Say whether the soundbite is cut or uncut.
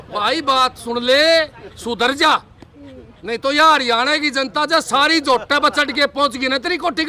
uncut